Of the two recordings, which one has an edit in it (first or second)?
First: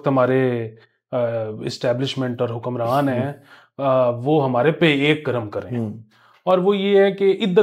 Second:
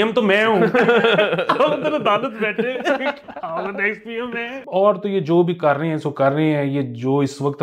second